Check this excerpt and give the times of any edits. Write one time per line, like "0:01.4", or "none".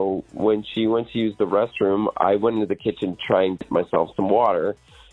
0:03.6